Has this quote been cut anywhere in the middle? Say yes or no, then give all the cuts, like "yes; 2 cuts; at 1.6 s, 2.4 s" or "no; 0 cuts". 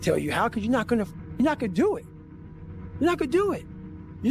no; 0 cuts